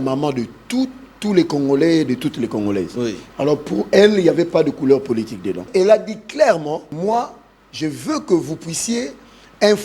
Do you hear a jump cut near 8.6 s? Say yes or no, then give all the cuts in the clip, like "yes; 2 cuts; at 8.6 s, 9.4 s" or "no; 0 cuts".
no; 2 cuts; at 5.6 s, 6.9 s